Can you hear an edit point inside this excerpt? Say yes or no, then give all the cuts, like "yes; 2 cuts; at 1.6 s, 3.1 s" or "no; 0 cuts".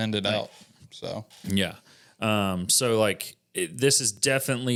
no; 0 cuts